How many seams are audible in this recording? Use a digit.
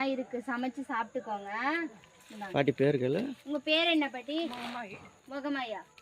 0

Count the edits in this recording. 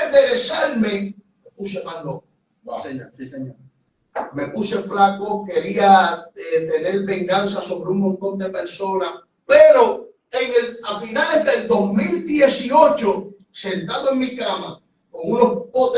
0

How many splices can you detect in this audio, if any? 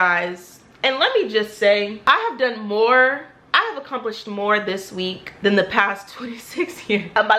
0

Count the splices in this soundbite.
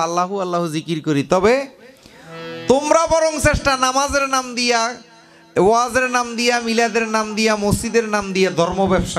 0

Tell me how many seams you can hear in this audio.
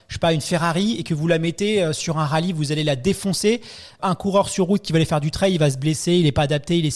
1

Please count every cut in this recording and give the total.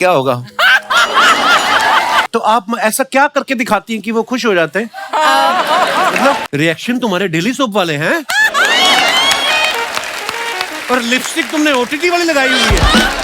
2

